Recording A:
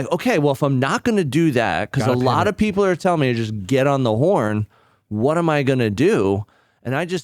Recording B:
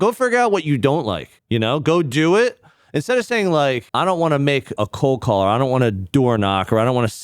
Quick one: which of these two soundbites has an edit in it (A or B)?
B